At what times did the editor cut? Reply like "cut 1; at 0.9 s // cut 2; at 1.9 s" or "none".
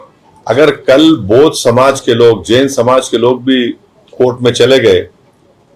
none